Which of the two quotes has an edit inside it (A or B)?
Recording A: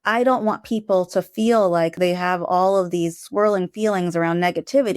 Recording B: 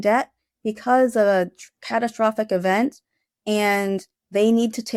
A